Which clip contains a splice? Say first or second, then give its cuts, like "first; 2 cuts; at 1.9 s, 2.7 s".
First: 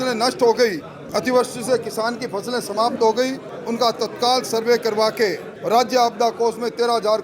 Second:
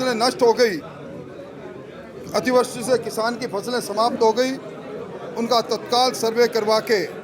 first; 3 cuts; at 0.9 s, 3.5 s, 5.5 s